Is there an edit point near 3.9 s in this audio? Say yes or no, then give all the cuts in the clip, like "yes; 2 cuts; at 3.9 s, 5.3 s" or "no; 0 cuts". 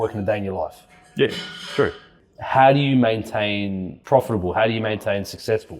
yes; 2 cuts; at 2.1 s, 3.9 s